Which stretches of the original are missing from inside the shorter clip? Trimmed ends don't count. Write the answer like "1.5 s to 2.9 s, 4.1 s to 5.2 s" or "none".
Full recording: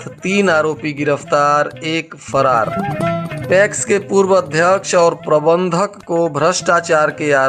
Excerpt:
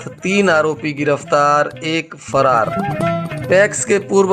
none